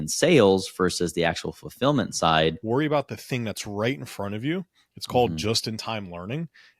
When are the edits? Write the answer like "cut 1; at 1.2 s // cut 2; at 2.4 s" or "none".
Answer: cut 1; at 2.6 s